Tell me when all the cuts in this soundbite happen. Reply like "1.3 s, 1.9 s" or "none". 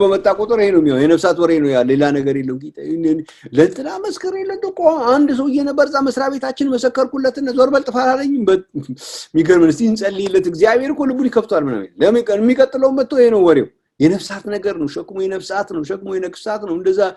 none